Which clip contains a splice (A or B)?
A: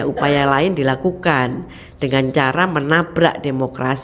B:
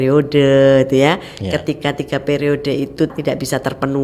B